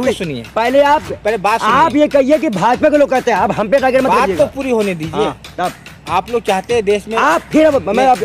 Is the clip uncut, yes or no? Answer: yes